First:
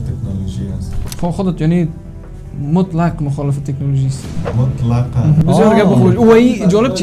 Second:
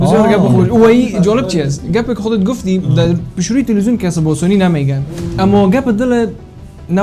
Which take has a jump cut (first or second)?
first